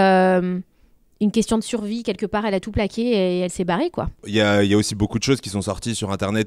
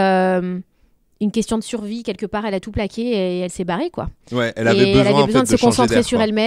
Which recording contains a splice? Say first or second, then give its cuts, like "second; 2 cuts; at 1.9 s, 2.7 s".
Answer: first; 1 cut; at 4.2 s